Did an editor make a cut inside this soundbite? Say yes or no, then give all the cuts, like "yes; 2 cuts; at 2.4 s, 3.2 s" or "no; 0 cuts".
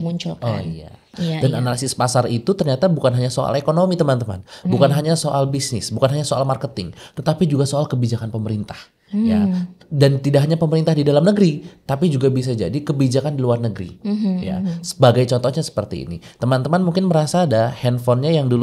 yes; 1 cut; at 1.1 s